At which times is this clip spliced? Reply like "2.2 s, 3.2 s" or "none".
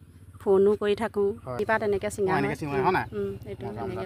1.7 s